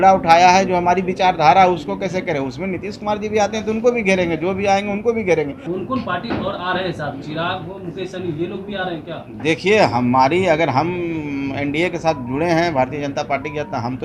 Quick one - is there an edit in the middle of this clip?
yes; 1 cut; at 5.6 s

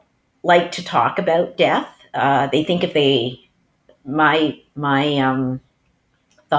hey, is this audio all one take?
yes; 0 cuts

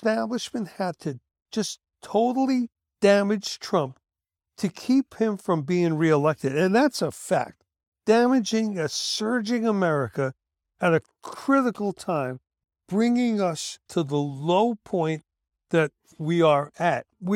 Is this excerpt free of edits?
yes; 0 cuts

